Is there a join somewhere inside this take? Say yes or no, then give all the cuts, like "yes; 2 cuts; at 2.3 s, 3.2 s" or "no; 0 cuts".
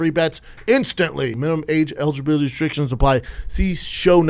yes; 1 cut; at 1.4 s